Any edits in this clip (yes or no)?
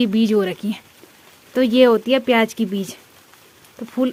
no